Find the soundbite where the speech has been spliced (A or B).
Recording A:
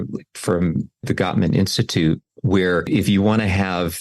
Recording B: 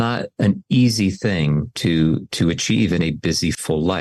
A